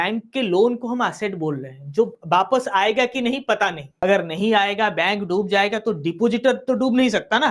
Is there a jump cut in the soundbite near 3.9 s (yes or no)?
yes